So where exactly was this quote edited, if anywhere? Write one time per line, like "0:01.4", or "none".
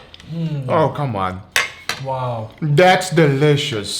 0:02.5